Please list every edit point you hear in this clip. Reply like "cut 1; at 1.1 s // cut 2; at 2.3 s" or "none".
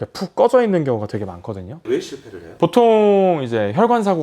cut 1; at 1.7 s